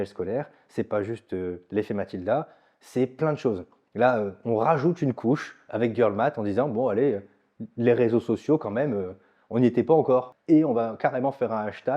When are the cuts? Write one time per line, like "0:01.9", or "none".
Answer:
0:10.3